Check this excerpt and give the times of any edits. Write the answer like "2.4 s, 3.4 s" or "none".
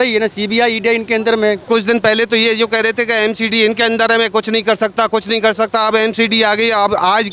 1.6 s